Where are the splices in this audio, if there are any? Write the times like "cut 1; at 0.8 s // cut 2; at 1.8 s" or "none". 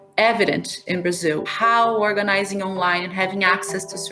cut 1; at 1.5 s